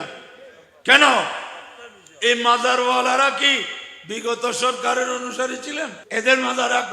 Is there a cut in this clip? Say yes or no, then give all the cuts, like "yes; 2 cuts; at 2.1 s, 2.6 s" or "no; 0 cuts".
yes; 1 cut; at 6.0 s